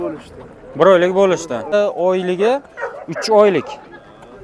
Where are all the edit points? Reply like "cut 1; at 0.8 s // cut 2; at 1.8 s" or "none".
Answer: cut 1; at 1.7 s